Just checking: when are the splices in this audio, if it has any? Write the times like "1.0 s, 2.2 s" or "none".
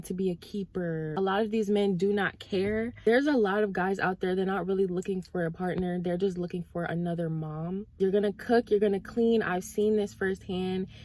1.1 s, 3.0 s, 8.0 s